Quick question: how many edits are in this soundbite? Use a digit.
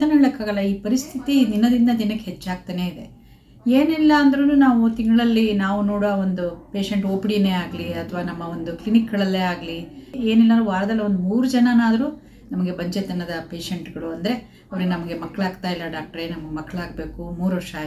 1